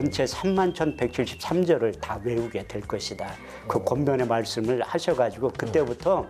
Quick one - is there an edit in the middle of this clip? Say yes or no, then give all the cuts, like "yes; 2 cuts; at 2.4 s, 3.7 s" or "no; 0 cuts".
no; 0 cuts